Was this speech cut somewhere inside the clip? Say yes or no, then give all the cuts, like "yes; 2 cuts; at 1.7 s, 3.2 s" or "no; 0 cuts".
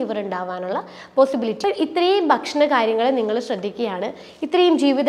yes; 1 cut; at 1.6 s